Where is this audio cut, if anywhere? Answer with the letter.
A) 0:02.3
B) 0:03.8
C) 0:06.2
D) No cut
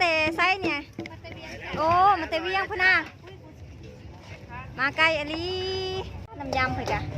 C